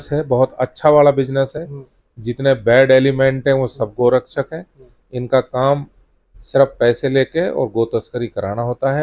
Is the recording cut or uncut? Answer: uncut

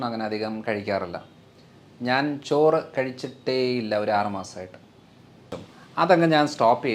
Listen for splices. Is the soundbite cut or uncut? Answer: cut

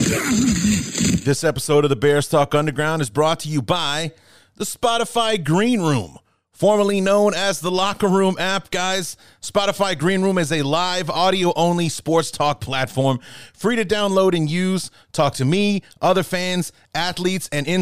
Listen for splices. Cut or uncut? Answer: cut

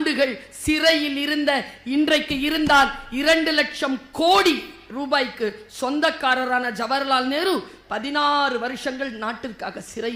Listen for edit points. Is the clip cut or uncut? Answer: uncut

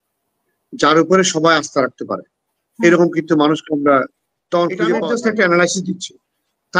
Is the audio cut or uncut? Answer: cut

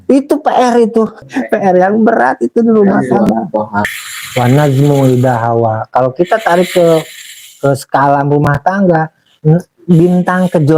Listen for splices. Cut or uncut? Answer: cut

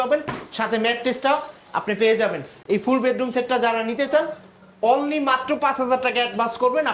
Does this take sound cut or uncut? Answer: uncut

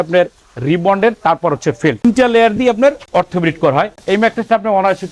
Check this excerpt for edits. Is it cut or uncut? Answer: cut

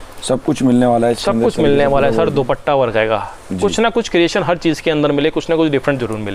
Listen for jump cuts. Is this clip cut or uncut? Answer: uncut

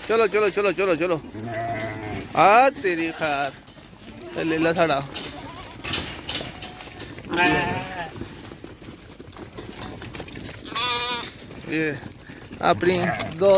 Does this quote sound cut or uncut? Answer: uncut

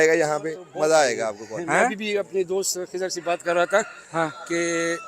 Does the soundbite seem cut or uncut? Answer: cut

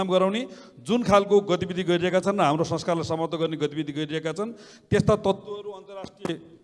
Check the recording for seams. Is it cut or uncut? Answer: uncut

